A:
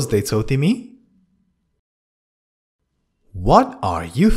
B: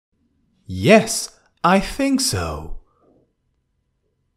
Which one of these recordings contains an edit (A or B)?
B